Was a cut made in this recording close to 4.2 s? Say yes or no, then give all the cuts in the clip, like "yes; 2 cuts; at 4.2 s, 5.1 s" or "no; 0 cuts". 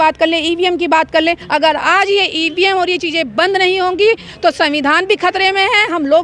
no; 1 cut; at 1.4 s